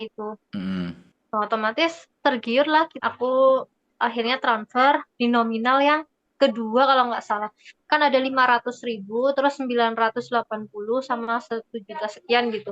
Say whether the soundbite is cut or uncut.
cut